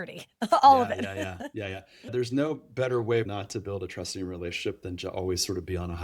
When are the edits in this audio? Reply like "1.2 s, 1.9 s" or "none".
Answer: 2.1 s, 3.3 s